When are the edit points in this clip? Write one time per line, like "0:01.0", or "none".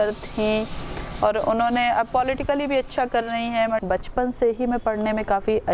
0:03.8